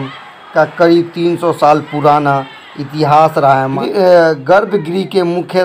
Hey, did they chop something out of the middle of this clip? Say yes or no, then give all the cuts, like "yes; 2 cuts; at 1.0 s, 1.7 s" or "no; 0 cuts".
yes; 1 cut; at 3.7 s